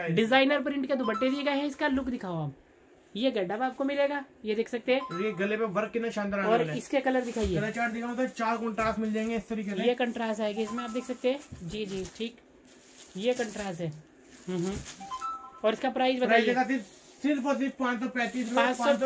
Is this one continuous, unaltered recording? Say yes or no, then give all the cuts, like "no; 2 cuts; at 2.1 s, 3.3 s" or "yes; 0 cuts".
yes; 0 cuts